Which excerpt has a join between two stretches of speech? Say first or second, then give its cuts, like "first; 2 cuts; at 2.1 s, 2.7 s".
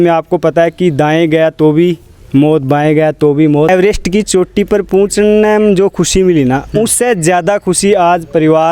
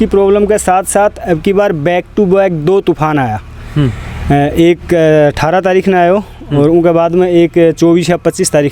first; 1 cut; at 3.7 s